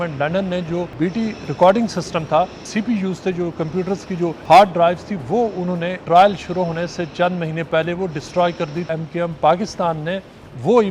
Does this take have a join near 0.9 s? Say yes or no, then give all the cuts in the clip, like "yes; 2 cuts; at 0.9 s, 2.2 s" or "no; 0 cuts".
yes; 5 cuts; at 0.9 s, 2.6 s, 4.4 s, 6.0 s, 8.9 s